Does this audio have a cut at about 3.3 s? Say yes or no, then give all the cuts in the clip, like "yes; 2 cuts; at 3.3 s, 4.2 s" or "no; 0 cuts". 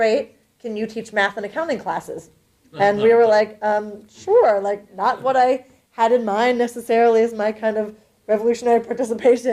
yes; 1 cut; at 3.3 s